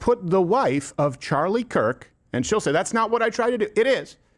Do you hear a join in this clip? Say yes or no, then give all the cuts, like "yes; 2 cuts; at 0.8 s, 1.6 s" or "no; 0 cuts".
no; 0 cuts